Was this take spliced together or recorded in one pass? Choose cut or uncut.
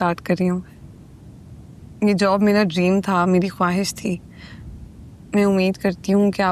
uncut